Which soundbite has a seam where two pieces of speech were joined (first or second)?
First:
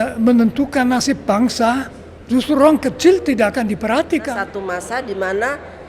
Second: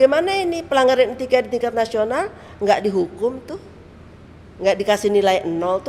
first